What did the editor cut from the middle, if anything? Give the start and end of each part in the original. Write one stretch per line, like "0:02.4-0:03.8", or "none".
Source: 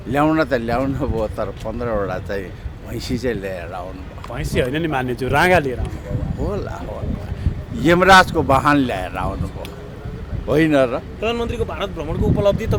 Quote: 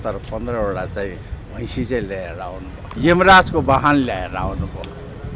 0:04.2-0:07.7